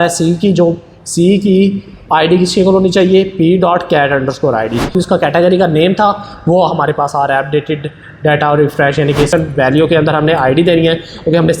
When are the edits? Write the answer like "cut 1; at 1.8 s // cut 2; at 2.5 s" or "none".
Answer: cut 1; at 4.9 s // cut 2; at 9.3 s

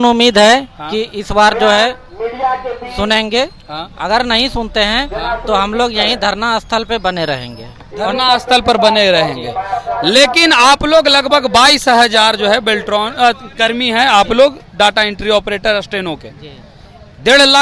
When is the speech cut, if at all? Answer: none

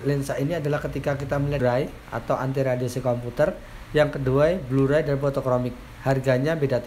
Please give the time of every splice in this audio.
cut 1; at 1.6 s

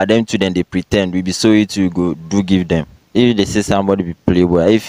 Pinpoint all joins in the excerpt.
cut 1; at 3.0 s

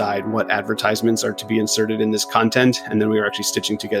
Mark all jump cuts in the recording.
none

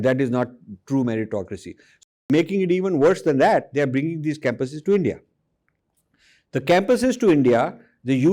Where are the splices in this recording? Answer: cut 1; at 2.0 s

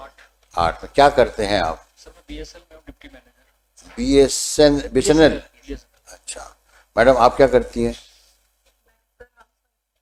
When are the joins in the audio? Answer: none

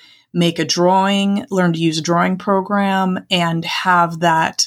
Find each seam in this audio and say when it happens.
none

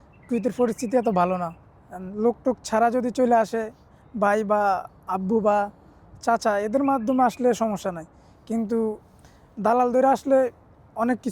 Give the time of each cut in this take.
none

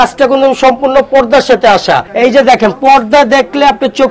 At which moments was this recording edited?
cut 1; at 2.1 s

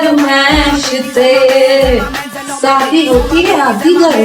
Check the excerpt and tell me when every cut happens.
none

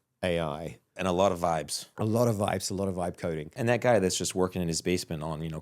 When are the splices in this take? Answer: cut 1; at 0.9 s // cut 2; at 1.8 s // cut 3; at 3.5 s

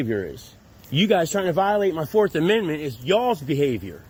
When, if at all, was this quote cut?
none

